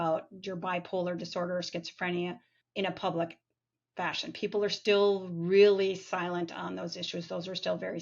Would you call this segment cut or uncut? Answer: cut